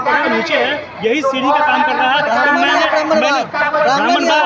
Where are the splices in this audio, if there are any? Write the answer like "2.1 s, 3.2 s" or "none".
none